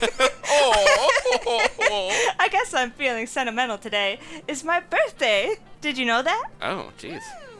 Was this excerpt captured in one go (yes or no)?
yes